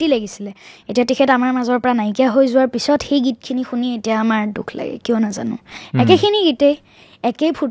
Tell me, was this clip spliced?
no; 0 cuts

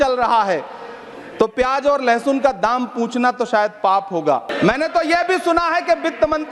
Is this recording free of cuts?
no; 1 cut; at 4.5 s

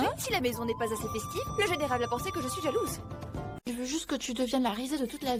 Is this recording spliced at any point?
no; 0 cuts

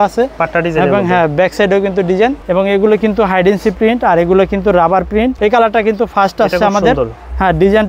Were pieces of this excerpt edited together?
yes; 2 cuts; at 2.4 s, 5.4 s

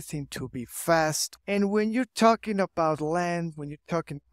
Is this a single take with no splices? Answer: no; 1 cut; at 1.3 s

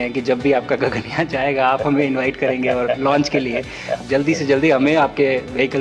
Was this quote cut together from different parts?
yes; 1 cut; at 4.0 s

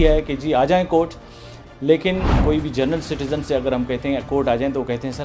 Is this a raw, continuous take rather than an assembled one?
no; 1 cut; at 2.3 s

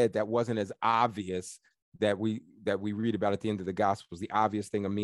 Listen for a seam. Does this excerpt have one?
no; 0 cuts

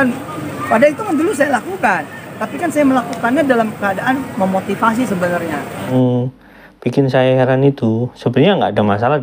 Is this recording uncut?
no; 1 cut; at 5.9 s

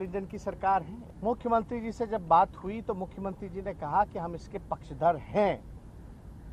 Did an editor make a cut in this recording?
yes; 1 cut; at 1.0 s

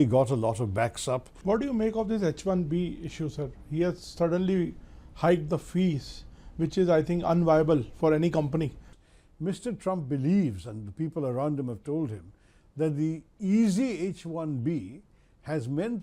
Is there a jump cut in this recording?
yes; 2 cuts; at 1.3 s, 8.8 s

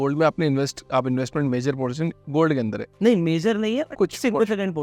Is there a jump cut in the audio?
yes; 1 cut; at 3.9 s

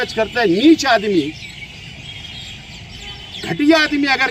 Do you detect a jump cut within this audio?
no; 0 cuts

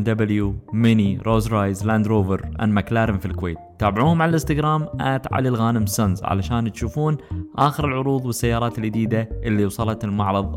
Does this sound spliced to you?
no; 0 cuts

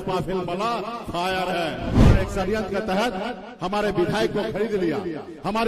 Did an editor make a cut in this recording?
yes; 1 cut; at 2.0 s

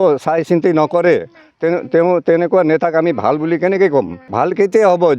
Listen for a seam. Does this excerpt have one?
yes; 1 cut; at 4.2 s

